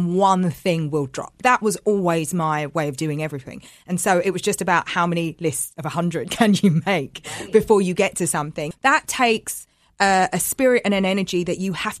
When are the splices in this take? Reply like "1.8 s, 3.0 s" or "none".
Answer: 1.4 s, 8.7 s